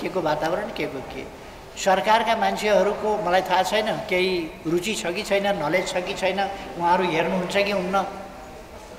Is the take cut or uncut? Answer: cut